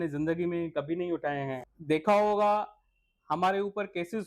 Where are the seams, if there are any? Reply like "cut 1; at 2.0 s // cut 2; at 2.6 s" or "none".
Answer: cut 1; at 1.7 s